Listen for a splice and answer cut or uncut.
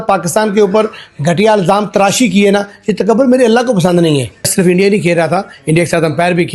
cut